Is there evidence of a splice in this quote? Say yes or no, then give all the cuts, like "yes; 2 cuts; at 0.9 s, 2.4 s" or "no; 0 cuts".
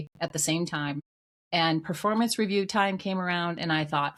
no; 0 cuts